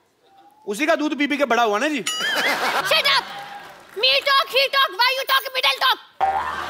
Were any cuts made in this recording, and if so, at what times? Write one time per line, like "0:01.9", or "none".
0:02.8